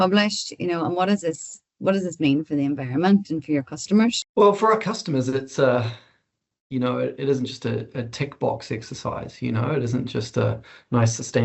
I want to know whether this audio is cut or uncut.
cut